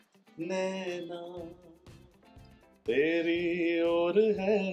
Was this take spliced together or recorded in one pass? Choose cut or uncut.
uncut